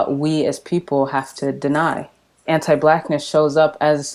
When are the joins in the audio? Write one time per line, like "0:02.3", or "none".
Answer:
0:02.4